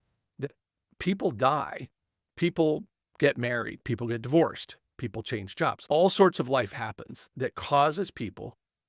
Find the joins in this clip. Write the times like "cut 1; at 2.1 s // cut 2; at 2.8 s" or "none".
cut 1; at 5.8 s